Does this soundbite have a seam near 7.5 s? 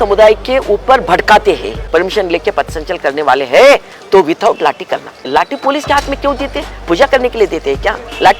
no; 2 cuts; at 1.8 s, 5.3 s

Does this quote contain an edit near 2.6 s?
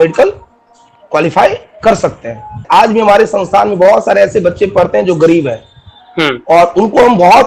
yes; 1 cut; at 2.6 s

